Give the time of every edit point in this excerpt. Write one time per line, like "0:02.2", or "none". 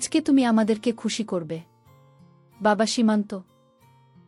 none